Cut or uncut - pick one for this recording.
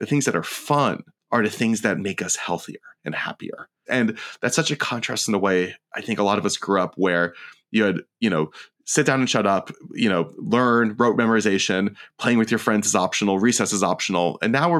cut